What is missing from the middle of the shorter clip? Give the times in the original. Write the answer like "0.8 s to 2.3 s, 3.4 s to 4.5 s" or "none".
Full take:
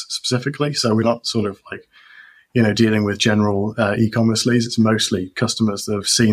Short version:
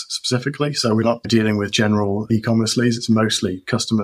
1.3 s to 2.7 s, 3.7 s to 4.0 s